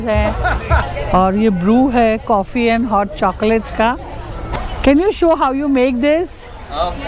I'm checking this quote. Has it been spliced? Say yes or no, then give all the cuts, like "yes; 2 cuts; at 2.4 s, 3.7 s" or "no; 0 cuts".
yes; 2 cuts; at 0.8 s, 4.4 s